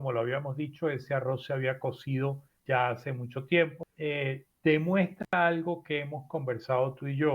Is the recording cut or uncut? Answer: cut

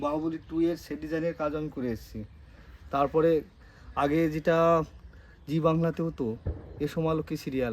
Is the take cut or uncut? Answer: uncut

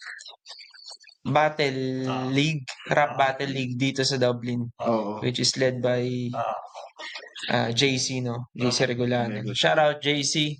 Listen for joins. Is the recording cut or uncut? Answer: uncut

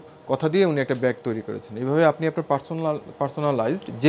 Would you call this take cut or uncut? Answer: uncut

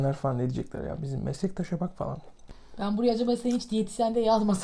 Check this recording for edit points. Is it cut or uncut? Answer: cut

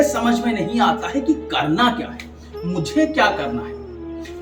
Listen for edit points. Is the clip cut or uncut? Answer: uncut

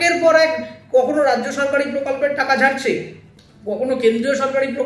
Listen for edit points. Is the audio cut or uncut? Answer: uncut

